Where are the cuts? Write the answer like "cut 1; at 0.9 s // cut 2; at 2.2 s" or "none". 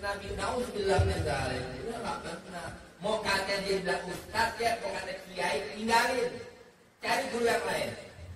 cut 1; at 7.1 s